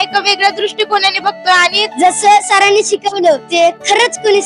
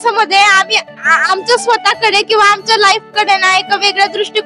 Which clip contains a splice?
first; 2 cuts; at 1.8 s, 3.5 s

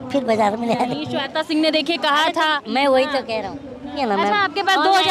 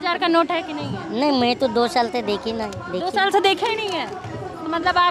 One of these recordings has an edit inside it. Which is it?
first; 1 cut; at 4.0 s

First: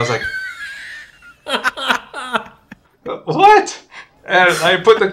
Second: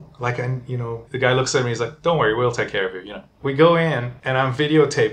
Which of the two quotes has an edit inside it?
second; 3 cuts; at 1.1 s, 3.3 s, 4.1 s

